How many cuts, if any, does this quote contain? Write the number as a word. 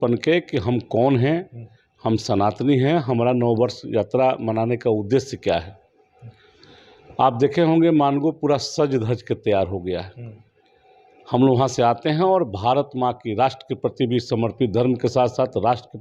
zero